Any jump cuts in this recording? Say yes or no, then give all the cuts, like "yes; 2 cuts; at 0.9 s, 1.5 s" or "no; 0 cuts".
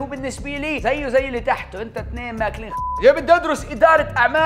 yes; 1 cut; at 3.0 s